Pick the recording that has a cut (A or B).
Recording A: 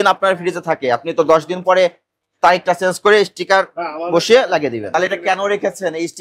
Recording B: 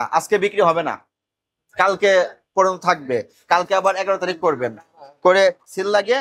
A